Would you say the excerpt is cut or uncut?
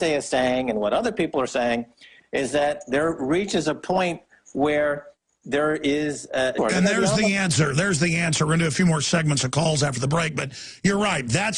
uncut